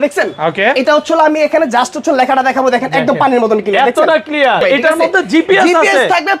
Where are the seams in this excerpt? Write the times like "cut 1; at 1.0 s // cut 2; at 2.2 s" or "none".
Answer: cut 1; at 4.6 s